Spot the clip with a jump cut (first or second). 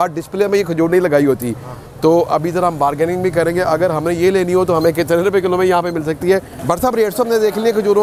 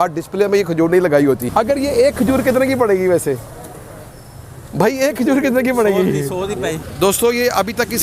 second